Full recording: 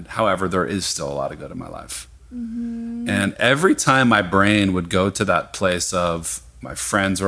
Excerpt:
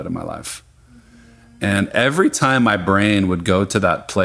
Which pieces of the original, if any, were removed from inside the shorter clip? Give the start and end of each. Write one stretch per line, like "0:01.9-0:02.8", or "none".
none